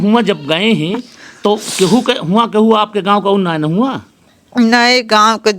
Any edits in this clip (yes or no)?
no